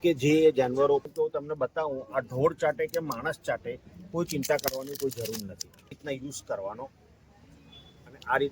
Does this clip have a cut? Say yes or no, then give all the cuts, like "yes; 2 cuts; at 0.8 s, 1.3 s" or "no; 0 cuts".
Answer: yes; 2 cuts; at 1.1 s, 6.0 s